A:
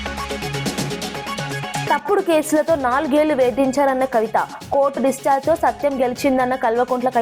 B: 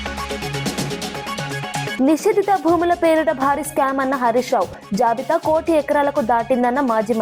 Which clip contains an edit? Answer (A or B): B